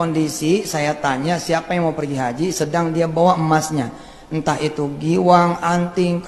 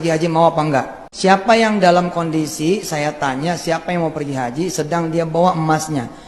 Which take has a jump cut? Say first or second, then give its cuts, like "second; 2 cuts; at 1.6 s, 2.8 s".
second; 1 cut; at 1.0 s